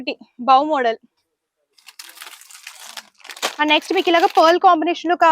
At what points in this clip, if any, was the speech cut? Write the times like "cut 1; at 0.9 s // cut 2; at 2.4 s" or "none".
none